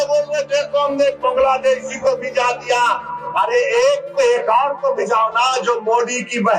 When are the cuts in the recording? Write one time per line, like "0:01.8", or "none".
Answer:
none